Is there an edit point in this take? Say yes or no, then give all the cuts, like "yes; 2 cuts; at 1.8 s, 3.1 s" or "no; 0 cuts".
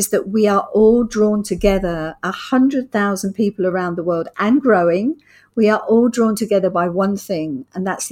no; 0 cuts